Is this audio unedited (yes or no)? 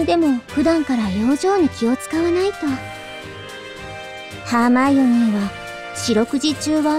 yes